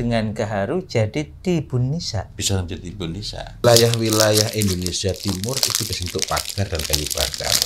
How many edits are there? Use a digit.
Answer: 1